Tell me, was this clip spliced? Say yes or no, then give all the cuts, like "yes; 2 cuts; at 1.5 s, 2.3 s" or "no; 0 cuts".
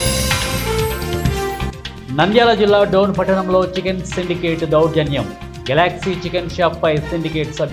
yes; 1 cut; at 1.7 s